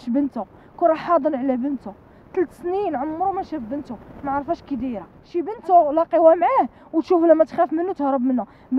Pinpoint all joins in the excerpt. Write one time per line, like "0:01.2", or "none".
0:05.2